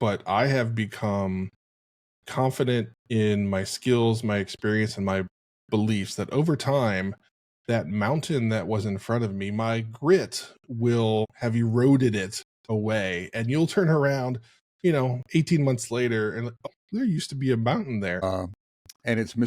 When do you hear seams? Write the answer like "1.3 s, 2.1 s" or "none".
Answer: 11.3 s, 16.6 s, 18.2 s